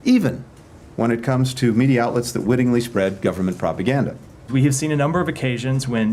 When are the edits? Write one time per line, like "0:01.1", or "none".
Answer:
0:04.3